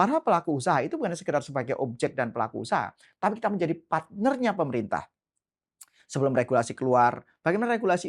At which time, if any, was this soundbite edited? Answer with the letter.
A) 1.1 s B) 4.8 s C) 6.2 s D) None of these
D